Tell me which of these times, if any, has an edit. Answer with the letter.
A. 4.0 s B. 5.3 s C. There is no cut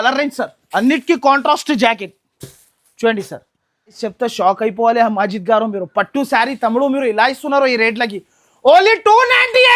A